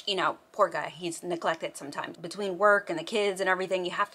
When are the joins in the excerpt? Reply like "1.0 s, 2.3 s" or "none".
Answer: 2.1 s